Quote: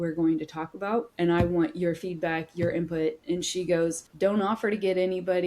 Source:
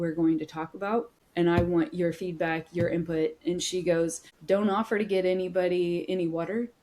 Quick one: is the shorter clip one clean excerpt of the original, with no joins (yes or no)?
no